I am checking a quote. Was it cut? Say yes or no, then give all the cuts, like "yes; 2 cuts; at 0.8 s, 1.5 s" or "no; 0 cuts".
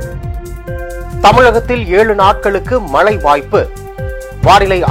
yes; 1 cut; at 1.2 s